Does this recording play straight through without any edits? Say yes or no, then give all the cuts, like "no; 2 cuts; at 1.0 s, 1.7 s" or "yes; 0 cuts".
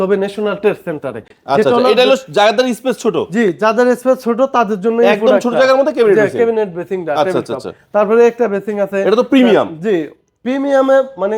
yes; 0 cuts